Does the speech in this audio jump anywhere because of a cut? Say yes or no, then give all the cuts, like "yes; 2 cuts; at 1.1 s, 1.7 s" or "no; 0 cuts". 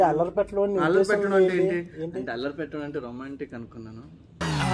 no; 0 cuts